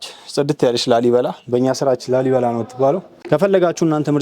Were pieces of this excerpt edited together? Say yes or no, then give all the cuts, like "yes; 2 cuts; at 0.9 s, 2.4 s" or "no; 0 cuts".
yes; 1 cut; at 3.1 s